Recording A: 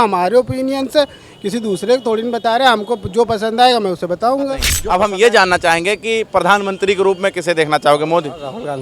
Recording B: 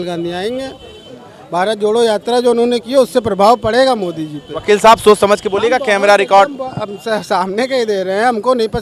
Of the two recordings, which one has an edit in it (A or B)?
A